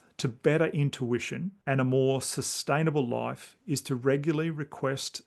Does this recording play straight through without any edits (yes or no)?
no